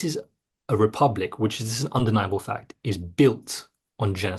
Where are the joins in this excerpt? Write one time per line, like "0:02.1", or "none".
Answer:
none